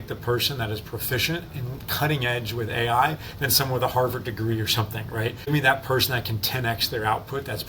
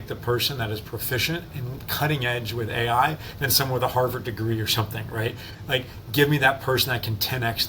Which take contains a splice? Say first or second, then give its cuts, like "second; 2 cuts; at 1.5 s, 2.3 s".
first; 1 cut; at 5.5 s